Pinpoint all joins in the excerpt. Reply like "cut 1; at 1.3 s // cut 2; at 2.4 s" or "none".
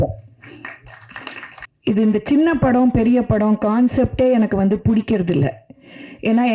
cut 1; at 1.7 s